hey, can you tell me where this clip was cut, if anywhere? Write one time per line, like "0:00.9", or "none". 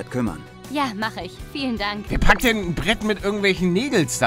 0:02.0